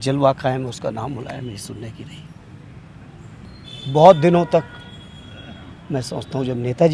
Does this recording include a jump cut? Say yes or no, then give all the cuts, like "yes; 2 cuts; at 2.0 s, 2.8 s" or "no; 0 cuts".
yes; 1 cut; at 3.5 s